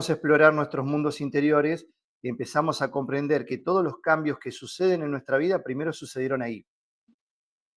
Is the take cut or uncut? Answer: uncut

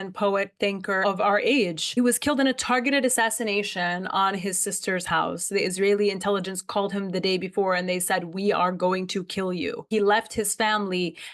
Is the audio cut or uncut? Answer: cut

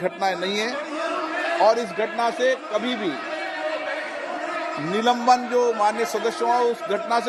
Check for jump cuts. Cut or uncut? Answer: uncut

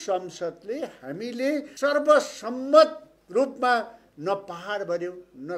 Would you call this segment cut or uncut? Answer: cut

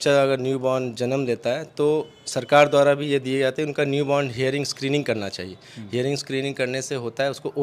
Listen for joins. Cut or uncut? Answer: uncut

